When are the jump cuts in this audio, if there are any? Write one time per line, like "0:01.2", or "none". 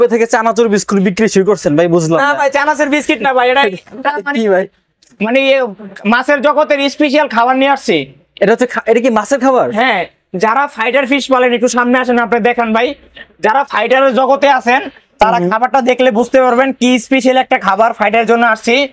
none